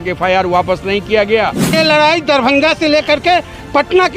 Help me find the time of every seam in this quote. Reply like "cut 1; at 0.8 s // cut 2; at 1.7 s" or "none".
cut 1; at 1.7 s